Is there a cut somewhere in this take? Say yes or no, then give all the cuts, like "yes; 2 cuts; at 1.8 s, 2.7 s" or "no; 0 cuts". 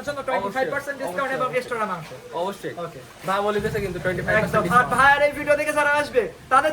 no; 0 cuts